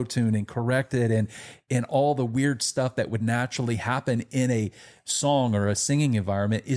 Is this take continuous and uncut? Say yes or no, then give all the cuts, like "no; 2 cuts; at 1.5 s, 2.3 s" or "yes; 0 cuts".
yes; 0 cuts